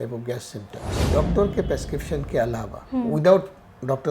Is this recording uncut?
no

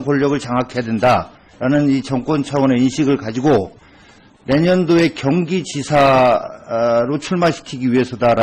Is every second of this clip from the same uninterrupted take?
yes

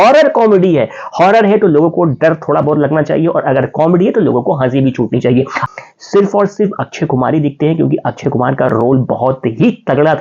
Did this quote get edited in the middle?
yes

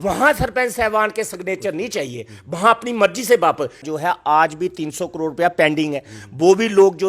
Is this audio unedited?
no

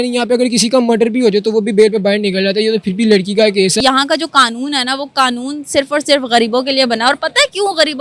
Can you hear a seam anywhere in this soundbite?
yes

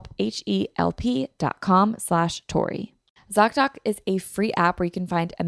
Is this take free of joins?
no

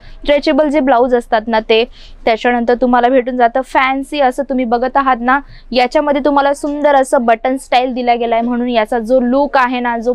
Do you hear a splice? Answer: no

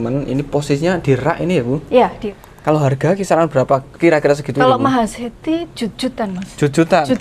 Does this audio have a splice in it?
yes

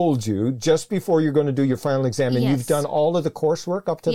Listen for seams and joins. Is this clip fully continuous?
yes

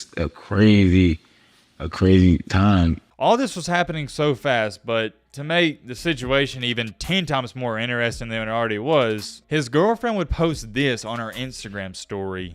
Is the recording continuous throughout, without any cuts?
no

